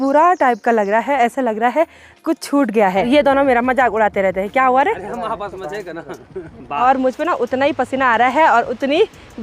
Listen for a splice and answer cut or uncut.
cut